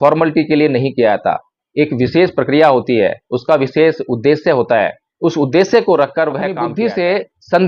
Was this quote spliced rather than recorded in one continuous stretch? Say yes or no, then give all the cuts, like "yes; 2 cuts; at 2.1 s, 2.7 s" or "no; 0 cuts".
yes; 1 cut; at 6.7 s